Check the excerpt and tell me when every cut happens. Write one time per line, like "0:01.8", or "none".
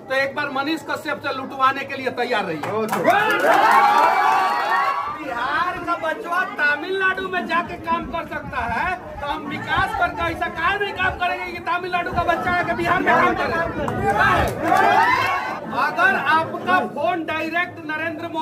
0:05.0
0:15.4